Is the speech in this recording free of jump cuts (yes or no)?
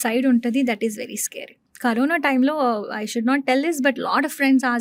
yes